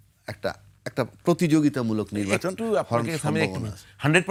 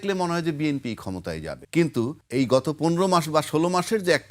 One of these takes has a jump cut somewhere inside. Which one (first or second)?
second